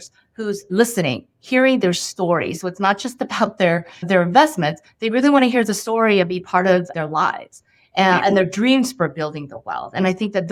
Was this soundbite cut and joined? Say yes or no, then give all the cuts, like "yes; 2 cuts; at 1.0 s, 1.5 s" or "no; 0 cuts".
no; 0 cuts